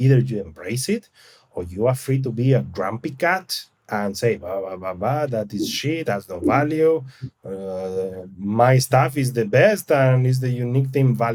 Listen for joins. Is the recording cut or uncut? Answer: uncut